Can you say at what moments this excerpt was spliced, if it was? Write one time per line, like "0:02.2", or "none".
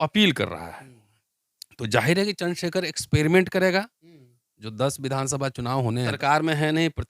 0:06.2